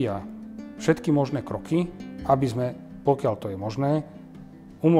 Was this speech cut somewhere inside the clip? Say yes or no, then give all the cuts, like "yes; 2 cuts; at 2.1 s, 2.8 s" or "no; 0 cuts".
no; 0 cuts